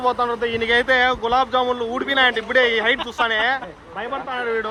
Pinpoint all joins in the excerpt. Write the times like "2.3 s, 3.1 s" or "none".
none